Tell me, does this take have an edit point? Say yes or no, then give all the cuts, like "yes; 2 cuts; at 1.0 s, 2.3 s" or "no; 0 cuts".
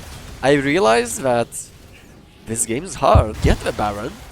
yes; 1 cut; at 3.4 s